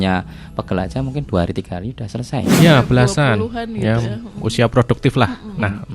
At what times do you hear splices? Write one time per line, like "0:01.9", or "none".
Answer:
0:02.6